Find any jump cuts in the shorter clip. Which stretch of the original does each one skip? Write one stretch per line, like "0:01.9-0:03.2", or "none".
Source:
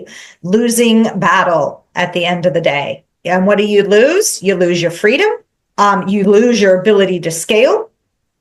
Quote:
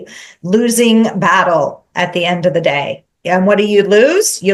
none